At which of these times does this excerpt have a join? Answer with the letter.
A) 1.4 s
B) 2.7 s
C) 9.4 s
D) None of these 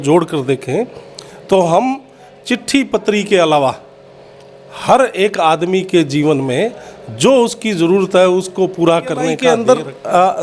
C